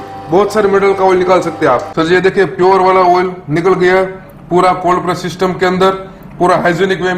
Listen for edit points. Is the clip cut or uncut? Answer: cut